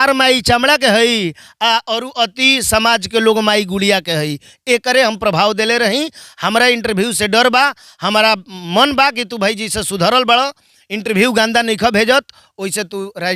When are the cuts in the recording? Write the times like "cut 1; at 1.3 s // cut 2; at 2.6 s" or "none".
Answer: none